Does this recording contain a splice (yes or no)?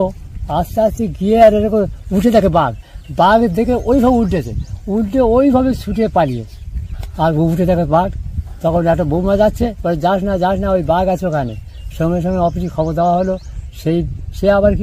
no